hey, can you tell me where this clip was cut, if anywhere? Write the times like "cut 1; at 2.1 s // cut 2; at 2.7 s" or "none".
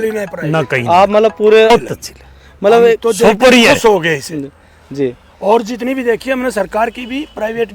cut 1; at 1.7 s